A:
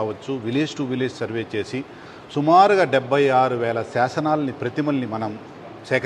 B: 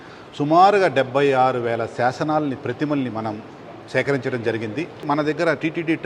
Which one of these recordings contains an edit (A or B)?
B